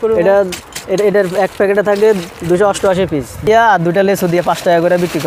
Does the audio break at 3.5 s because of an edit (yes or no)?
yes